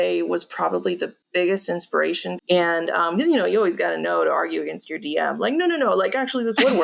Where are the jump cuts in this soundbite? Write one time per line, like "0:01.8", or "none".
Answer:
0:01.2
0:02.3